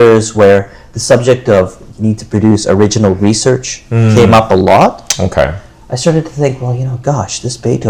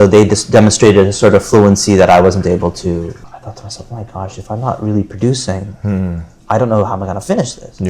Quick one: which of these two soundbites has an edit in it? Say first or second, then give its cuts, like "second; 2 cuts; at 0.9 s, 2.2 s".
second; 1 cut; at 3.2 s